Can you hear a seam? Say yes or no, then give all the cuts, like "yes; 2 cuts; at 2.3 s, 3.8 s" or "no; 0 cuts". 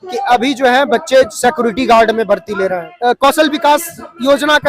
yes; 1 cut; at 2.9 s